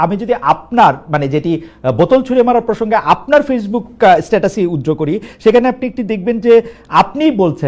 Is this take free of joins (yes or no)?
yes